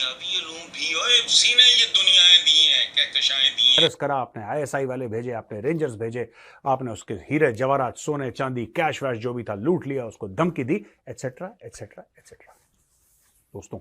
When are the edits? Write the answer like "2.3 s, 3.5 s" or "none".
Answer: 3.7 s